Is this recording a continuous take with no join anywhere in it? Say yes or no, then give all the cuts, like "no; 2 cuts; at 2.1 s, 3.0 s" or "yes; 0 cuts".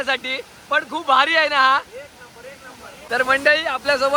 yes; 0 cuts